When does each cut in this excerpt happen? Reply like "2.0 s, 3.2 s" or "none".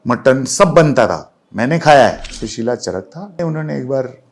2.4 s, 3.4 s